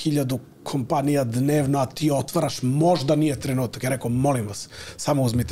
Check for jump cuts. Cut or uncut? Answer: uncut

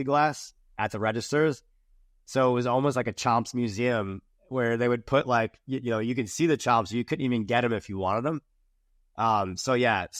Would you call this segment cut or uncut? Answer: uncut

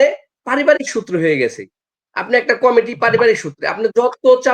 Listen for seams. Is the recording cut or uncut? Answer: uncut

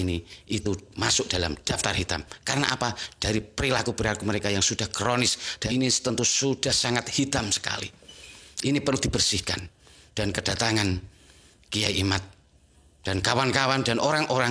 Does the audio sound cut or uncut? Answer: cut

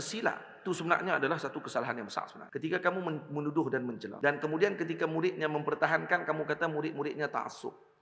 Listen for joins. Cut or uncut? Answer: cut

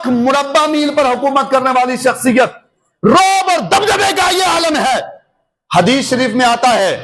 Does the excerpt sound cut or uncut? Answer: uncut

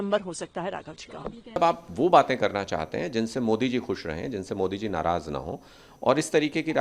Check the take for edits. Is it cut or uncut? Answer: cut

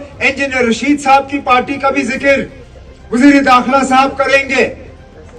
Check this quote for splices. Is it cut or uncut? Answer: uncut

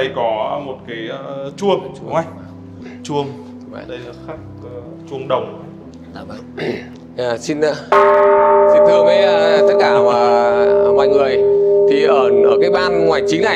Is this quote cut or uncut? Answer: uncut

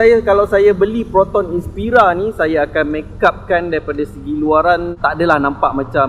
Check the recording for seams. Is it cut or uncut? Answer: uncut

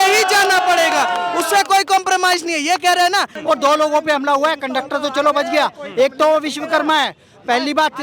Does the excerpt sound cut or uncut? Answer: cut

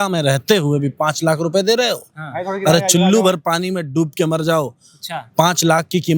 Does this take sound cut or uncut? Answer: uncut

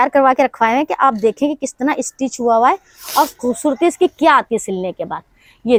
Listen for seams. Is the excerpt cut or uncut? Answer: uncut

